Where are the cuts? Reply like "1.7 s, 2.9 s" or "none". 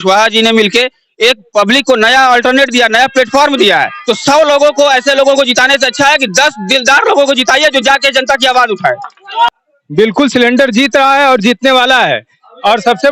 3.9 s, 9.5 s